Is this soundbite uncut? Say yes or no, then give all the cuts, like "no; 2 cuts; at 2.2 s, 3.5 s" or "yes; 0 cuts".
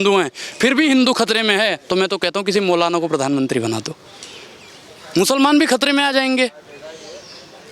yes; 0 cuts